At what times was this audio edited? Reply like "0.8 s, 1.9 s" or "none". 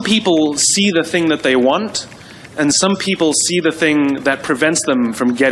none

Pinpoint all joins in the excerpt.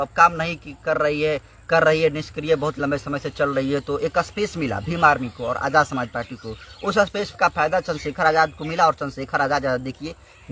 none

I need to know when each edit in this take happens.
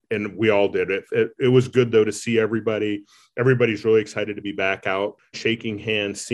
5.4 s

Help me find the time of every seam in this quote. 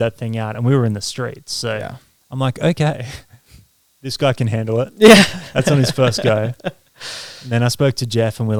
none

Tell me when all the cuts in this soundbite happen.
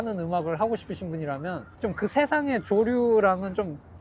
1.7 s

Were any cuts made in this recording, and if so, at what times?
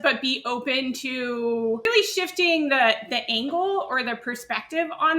1.9 s

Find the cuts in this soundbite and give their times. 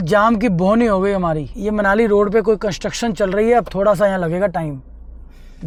none

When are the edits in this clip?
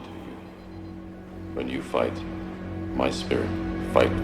1.6 s

